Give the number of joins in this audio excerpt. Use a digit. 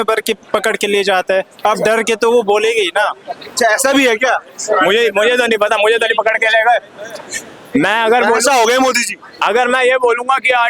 0